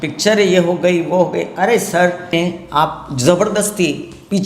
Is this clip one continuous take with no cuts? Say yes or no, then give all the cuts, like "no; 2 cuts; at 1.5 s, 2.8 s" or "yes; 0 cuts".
no; 1 cut; at 2.3 s